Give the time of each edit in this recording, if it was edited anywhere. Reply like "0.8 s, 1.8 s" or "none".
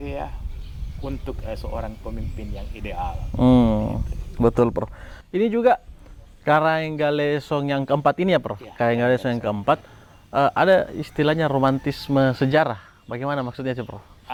none